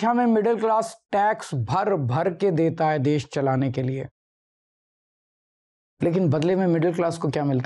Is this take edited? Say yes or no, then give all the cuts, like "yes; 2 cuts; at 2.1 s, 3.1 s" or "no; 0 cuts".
no; 0 cuts